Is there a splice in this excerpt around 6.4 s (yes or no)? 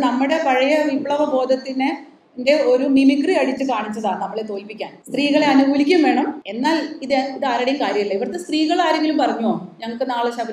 yes